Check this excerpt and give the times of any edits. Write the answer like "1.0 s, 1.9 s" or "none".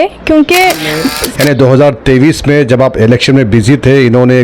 1.2 s

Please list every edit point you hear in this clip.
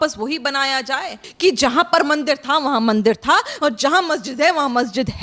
1.2 s

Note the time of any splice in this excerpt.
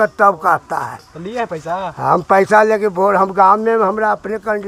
none

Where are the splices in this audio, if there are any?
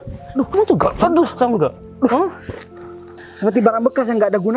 3.2 s

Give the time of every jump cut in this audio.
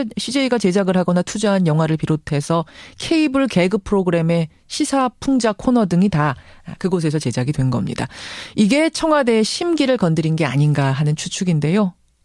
4.2 s

